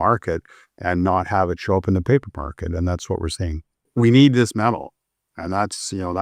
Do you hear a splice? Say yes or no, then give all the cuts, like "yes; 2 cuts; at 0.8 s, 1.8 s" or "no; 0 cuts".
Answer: yes; 1 cut; at 3.8 s